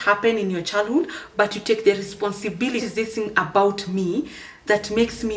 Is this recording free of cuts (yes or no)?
no